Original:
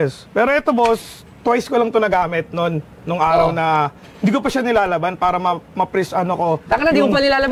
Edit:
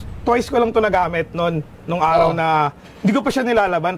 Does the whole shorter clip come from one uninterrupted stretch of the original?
yes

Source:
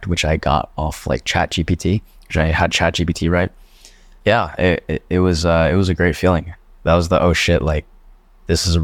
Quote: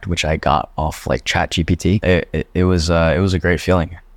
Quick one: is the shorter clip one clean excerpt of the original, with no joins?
no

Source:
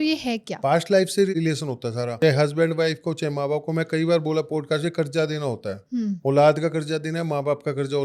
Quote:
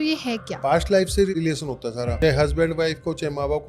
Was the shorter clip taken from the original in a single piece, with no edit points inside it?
yes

